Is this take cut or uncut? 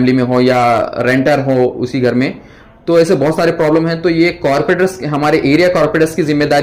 uncut